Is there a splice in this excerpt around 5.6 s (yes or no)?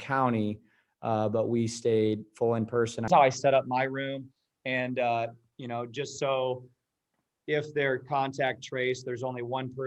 no